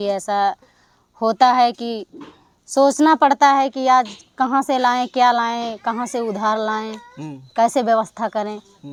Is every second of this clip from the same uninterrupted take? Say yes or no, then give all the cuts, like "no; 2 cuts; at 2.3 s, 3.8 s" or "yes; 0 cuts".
yes; 0 cuts